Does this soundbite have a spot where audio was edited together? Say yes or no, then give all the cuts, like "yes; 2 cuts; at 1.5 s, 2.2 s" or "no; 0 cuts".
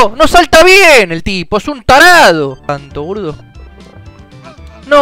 yes; 1 cut; at 2.7 s